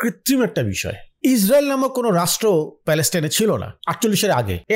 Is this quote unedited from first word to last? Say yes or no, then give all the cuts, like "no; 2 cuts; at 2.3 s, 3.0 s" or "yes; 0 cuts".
no; 2 cuts; at 1.1 s, 3.8 s